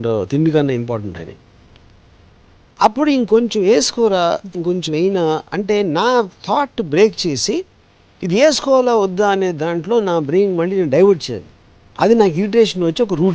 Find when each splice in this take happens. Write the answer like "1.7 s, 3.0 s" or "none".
none

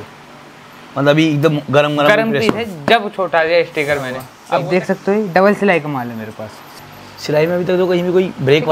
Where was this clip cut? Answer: 4.3 s, 6.7 s

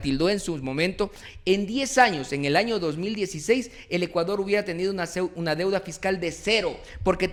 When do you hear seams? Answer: none

